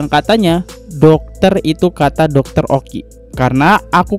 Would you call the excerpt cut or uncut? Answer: uncut